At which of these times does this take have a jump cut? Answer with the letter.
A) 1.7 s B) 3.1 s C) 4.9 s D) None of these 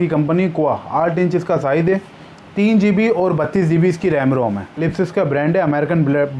C